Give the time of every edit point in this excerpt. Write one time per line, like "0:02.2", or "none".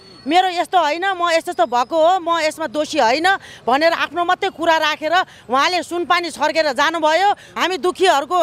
0:07.5